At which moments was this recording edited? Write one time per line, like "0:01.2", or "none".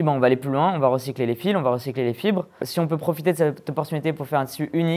0:02.6

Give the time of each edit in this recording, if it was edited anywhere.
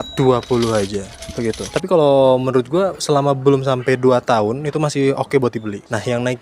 0:01.6

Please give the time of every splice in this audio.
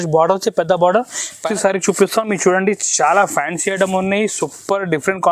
0:01.5

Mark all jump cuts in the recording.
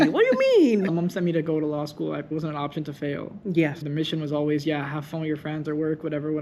0:00.9
0:02.3
0:03.8

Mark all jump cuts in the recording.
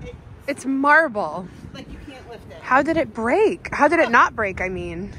none

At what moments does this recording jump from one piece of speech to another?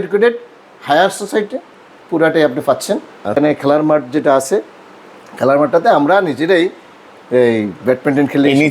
0:03.4

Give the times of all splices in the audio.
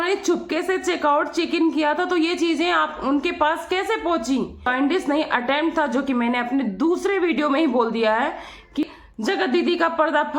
0:04.7
0:08.8

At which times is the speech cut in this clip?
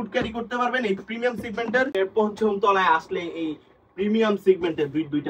0:01.9

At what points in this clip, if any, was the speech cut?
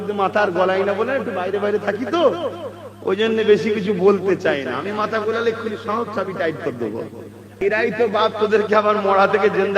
0:07.5

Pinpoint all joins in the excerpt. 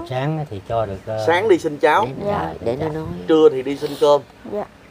none

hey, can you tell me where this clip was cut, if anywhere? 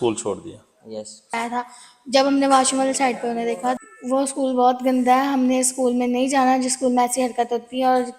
0:01.4
0:03.8

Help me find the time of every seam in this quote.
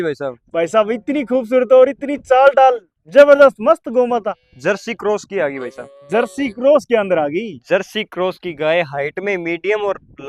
none

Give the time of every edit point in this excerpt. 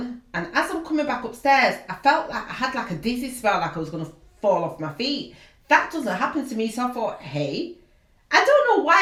none

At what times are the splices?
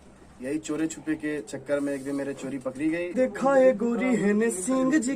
0:02.8

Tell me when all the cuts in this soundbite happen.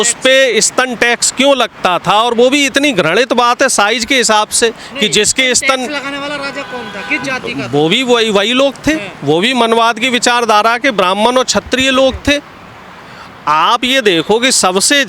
none

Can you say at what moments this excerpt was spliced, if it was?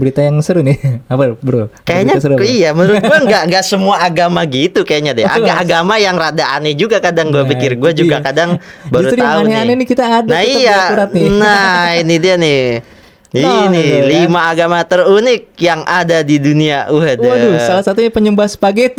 none

